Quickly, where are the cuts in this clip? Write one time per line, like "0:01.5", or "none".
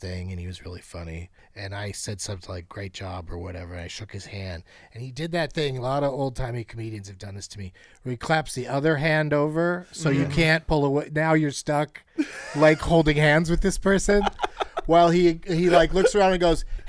0:01.4